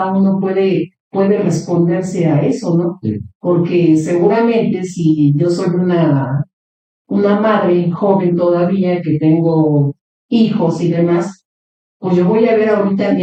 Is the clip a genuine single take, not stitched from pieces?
yes; 0 cuts

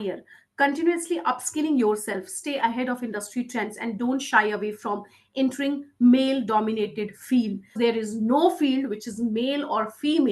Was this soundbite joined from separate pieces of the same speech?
yes; 1 cut; at 7.8 s

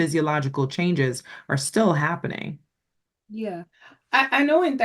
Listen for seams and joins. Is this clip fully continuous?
yes; 0 cuts

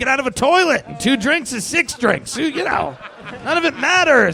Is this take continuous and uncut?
yes; 0 cuts

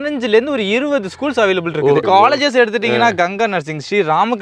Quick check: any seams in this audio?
yes; 1 cut; at 2.0 s

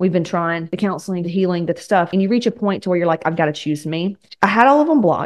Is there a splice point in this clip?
yes; 3 cuts; at 0.9 s, 2.1 s, 4.2 s

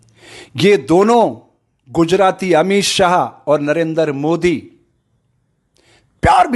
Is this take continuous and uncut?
yes; 0 cuts

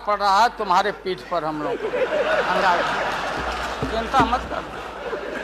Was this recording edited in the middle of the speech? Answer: no; 0 cuts

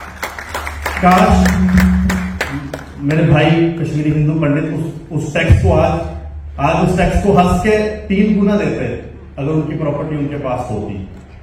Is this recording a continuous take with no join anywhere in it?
yes; 0 cuts

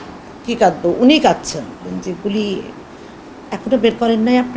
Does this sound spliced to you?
yes; 1 cut; at 1.9 s

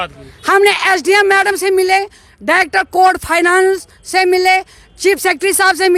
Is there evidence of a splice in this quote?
no; 0 cuts

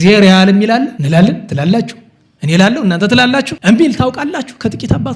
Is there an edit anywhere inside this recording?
yes; 2 cuts; at 1.0 s, 3.5 s

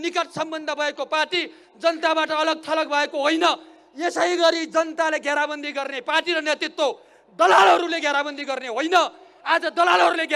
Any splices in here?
no; 0 cuts

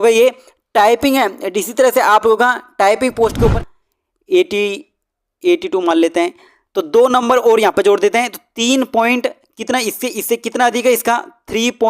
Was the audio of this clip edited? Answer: yes; 1 cut; at 3.5 s

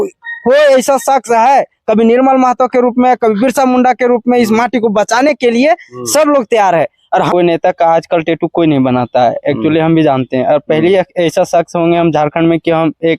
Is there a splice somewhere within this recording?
yes; 1 cut; at 7.3 s

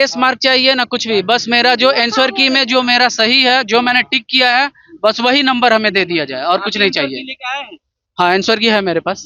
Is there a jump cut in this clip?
no; 0 cuts

